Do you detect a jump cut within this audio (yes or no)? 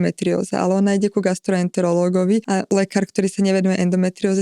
yes